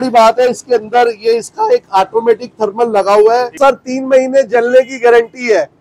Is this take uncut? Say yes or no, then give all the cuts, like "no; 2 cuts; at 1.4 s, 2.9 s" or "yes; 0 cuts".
no; 1 cut; at 3.5 s